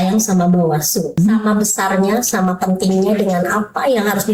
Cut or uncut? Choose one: cut